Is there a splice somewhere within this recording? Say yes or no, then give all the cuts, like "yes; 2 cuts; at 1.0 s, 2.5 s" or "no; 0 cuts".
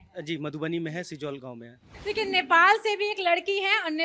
yes; 1 cut; at 1.9 s